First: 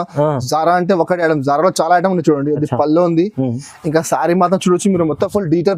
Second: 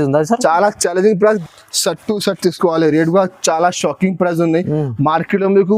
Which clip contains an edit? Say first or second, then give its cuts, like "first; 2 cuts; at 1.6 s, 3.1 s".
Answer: second; 1 cut; at 1.4 s